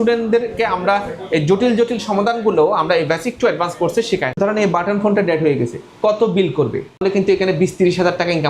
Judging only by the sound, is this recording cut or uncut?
cut